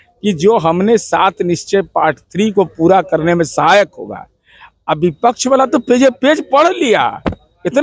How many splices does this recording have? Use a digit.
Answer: 0